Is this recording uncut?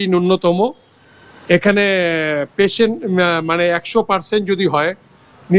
yes; 0 cuts

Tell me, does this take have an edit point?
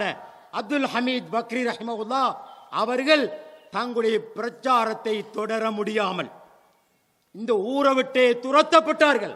no; 0 cuts

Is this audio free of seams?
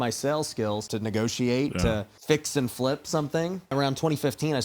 no; 3 cuts; at 0.8 s, 2.1 s, 3.7 s

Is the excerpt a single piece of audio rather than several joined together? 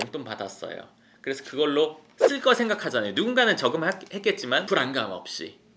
no; 1 cut; at 4.6 s

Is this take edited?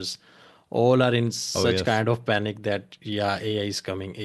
no; 0 cuts

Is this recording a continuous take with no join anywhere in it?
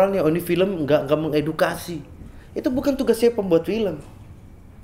yes; 0 cuts

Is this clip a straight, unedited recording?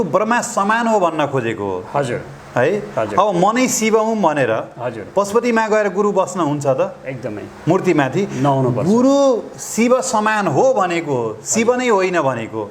yes; 0 cuts

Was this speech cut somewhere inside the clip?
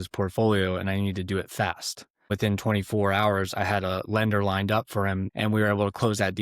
yes; 2 cuts; at 2.3 s, 5.3 s

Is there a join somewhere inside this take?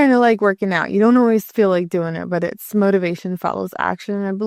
no; 0 cuts

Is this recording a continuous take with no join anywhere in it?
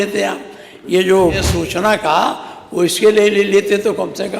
no; 1 cut; at 1.5 s

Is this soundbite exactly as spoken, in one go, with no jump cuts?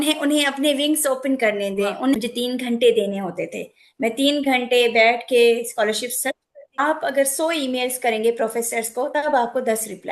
no; 2 cuts; at 2.2 s, 6.8 s

